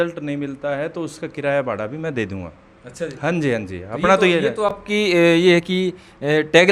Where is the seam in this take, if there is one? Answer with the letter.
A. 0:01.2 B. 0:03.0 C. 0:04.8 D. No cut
D